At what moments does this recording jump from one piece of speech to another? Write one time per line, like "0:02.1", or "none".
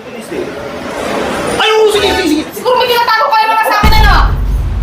0:02.5